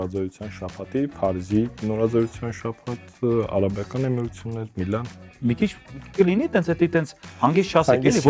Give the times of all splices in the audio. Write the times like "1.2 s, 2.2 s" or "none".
none